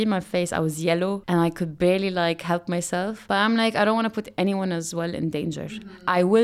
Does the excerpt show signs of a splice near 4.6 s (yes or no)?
no